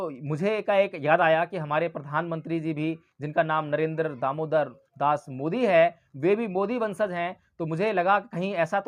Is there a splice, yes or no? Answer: no